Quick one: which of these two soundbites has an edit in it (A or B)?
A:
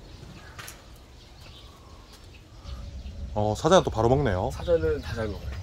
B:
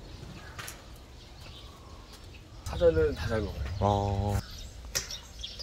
B